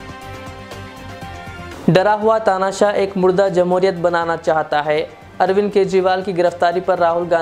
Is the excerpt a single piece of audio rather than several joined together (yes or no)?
no